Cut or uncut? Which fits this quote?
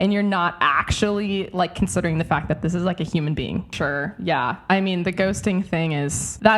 cut